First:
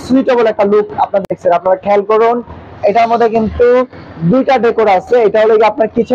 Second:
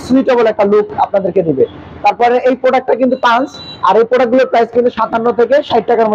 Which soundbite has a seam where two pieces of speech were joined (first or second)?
first